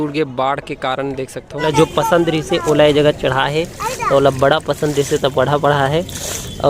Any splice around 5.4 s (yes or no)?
no